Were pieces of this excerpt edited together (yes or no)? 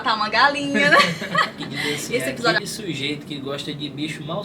yes